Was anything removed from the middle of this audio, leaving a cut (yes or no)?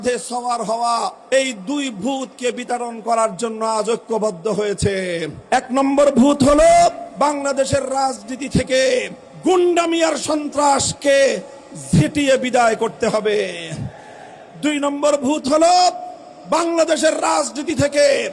yes